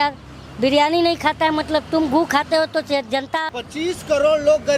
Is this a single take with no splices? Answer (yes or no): no